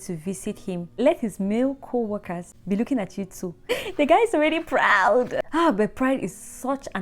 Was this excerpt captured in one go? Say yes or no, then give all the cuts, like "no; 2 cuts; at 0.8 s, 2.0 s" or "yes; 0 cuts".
no; 4 cuts; at 0.9 s, 2.5 s, 3.7 s, 5.4 s